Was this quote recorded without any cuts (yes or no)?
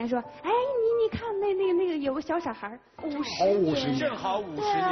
no